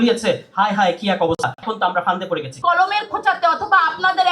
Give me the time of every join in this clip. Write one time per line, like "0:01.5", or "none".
0:02.6

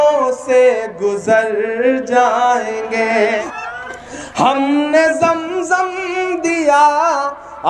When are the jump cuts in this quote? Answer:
0:03.5

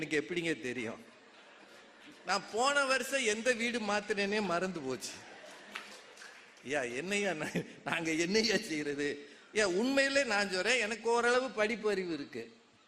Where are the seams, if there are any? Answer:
none

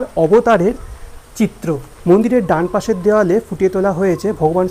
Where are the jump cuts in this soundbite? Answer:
0:01.9

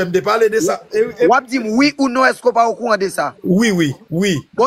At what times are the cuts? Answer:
0:03.3

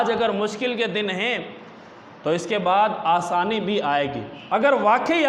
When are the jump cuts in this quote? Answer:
0:04.3

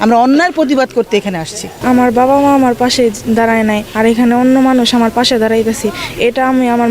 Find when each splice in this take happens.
0:01.7

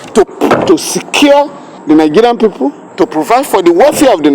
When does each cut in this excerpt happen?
0:01.7
0:02.8

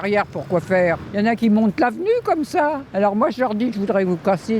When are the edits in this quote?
0:01.3
0:02.8

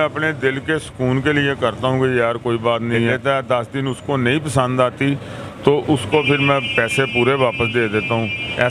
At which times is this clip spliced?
0:03.2

